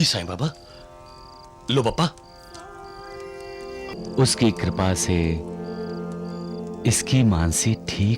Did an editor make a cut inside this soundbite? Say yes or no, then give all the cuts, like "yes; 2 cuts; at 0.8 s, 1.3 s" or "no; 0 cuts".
yes; 1 cut; at 3.9 s